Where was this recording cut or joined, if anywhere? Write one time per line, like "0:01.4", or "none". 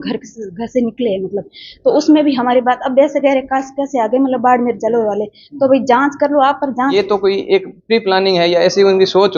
0:06.9